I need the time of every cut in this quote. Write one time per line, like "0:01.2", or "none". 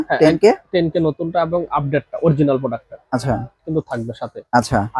0:03.6